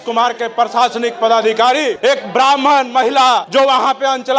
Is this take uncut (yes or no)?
no